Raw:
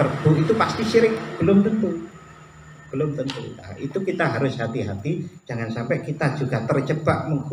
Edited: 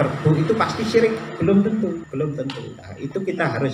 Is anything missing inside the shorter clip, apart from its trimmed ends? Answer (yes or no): yes